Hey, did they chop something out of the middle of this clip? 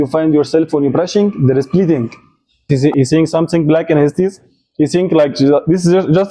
yes; 1 cut; at 2.6 s

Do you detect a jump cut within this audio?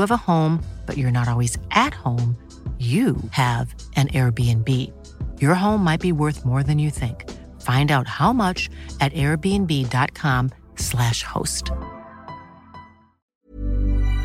yes; 1 cut; at 13.3 s

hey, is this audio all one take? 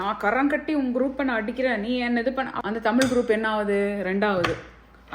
no; 1 cut; at 2.6 s

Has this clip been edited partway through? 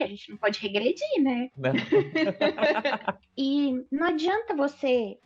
yes; 1 cut; at 3.1 s

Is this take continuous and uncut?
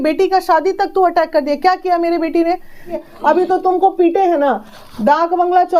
no; 1 cut; at 3.0 s

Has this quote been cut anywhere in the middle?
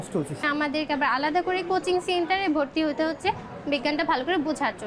no; 0 cuts

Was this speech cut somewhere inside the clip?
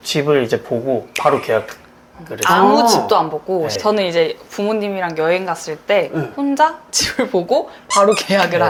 no; 0 cuts

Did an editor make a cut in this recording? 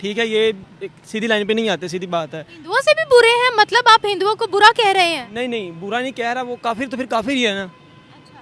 no; 0 cuts

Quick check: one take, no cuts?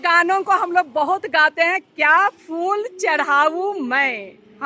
yes; 0 cuts

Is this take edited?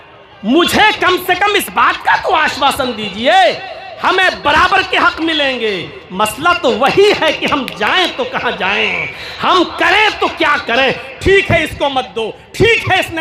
no; 0 cuts

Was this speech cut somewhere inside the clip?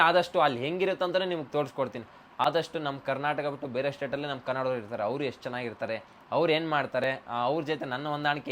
no; 0 cuts

